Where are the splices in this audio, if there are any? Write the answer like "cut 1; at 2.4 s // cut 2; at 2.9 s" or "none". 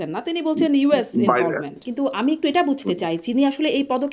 cut 1; at 1.8 s

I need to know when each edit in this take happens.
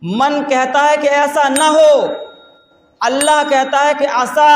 none

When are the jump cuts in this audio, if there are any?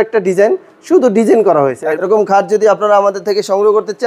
cut 1; at 1.9 s

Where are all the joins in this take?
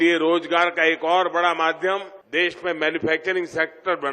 cut 1; at 2.2 s

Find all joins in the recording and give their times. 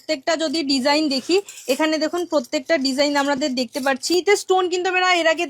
cut 1; at 4.1 s

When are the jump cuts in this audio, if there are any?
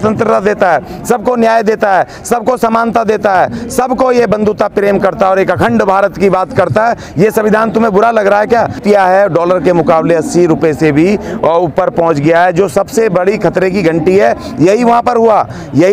cut 1; at 8.8 s

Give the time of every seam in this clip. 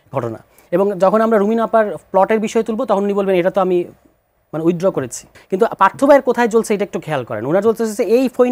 cut 1; at 5.3 s

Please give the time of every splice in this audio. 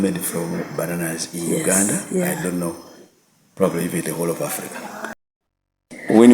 cut 1; at 5.1 s

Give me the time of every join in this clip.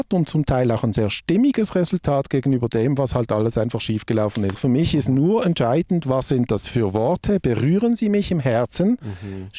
cut 1; at 4.6 s

